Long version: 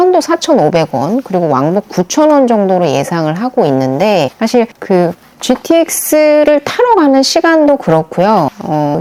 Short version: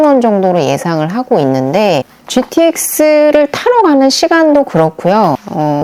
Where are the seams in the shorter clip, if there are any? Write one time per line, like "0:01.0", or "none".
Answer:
0:02.1